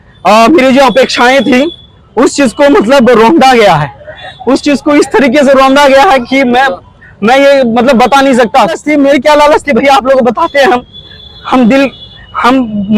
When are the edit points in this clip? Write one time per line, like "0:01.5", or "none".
0:08.8